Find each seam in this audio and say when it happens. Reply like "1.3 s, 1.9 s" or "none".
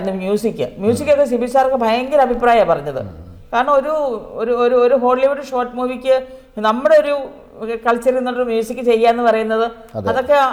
none